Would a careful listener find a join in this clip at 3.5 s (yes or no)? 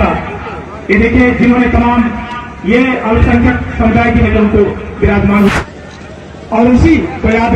no